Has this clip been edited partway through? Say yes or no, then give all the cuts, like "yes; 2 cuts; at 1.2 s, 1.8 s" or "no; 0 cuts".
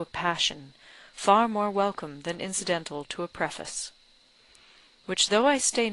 yes; 1 cut; at 2.6 s